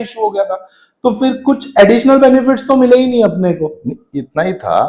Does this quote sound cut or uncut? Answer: uncut